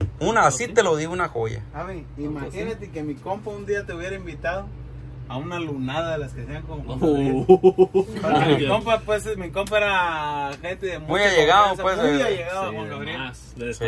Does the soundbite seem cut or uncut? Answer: uncut